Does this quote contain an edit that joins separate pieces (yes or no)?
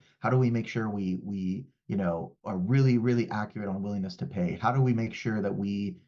no